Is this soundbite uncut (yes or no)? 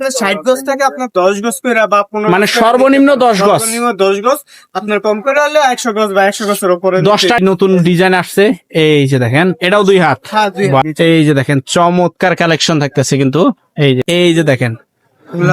no